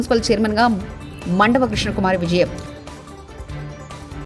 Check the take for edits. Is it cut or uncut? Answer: uncut